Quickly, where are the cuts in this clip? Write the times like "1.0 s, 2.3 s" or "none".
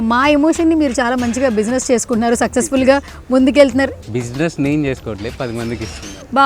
4.0 s